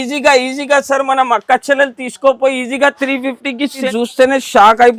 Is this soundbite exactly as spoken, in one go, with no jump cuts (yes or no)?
no